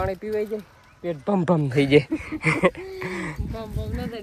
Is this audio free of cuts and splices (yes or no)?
yes